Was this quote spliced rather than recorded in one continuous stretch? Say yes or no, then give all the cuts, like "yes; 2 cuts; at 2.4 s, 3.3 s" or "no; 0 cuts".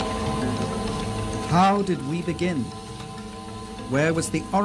no; 0 cuts